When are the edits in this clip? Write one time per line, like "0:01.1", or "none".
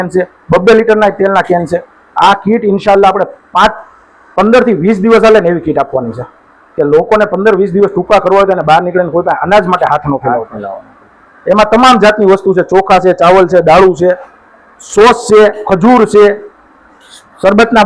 none